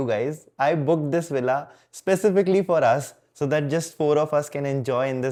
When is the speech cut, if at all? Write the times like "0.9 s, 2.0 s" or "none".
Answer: none

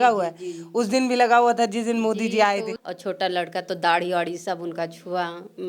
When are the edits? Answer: 2.7 s

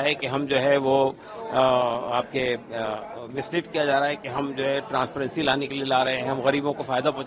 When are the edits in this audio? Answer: none

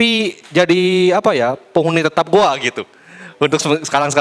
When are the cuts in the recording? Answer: none

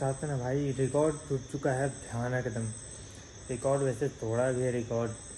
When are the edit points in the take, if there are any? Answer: none

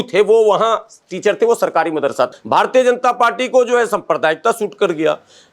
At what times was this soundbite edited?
2.3 s

